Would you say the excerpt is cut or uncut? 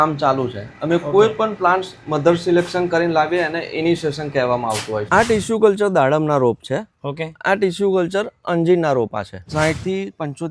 cut